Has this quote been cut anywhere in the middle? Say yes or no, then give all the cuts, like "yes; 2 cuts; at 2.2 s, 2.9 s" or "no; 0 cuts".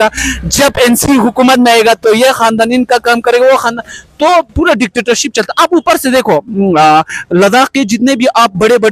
no; 0 cuts